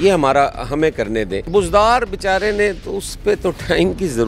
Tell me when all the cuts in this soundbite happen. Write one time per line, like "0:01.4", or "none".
0:01.4